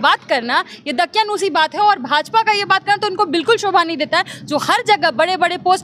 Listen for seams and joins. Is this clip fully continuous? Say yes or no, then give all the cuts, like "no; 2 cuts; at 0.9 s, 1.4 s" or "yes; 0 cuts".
yes; 0 cuts